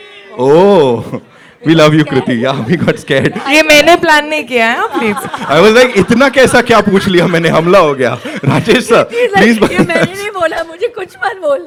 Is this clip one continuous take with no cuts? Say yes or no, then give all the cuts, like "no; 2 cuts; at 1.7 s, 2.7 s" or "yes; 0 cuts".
yes; 0 cuts